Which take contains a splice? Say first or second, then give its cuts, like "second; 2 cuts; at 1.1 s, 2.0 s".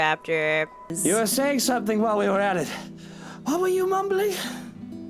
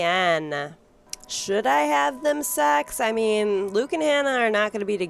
first; 1 cut; at 0.9 s